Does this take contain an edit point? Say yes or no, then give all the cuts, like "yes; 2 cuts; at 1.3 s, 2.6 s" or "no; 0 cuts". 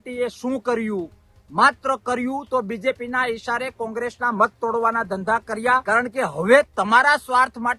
yes; 1 cut; at 5.8 s